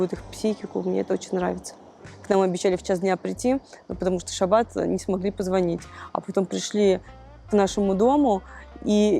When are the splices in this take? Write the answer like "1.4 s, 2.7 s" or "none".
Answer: 2.1 s